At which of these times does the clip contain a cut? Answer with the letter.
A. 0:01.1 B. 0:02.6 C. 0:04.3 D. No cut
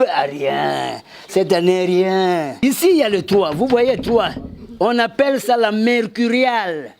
B